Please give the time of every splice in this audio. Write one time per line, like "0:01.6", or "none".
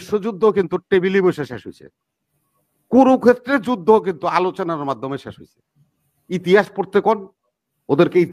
none